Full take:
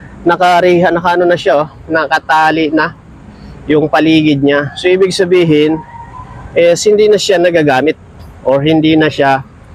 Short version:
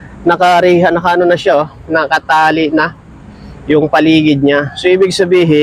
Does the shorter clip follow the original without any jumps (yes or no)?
yes